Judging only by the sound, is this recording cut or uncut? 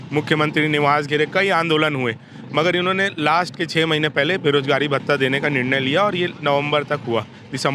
uncut